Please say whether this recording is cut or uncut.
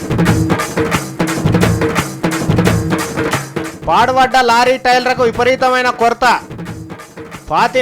uncut